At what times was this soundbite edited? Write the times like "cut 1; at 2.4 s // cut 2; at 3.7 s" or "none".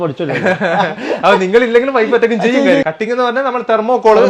cut 1; at 2.8 s